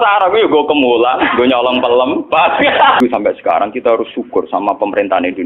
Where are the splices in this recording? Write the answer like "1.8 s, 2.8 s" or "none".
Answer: 3.0 s